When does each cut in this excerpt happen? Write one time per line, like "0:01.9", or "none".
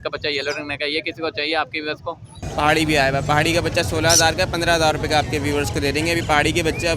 0:02.4